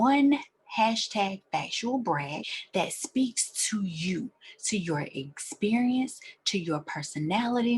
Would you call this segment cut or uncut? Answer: cut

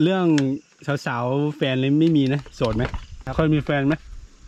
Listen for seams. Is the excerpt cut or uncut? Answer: cut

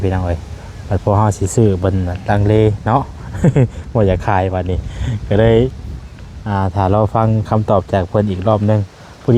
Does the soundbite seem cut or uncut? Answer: uncut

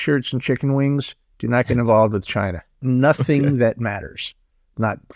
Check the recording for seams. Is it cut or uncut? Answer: cut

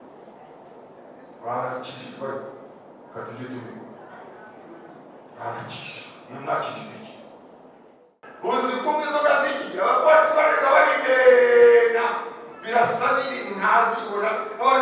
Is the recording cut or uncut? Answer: cut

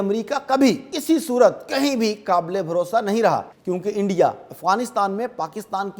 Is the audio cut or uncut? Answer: cut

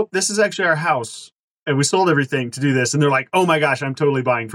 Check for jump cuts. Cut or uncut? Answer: uncut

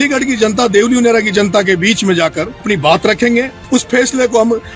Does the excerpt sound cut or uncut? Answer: cut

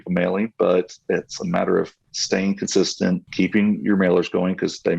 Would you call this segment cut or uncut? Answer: cut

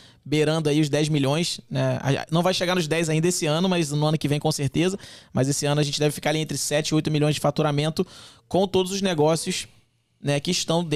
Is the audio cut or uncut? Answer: uncut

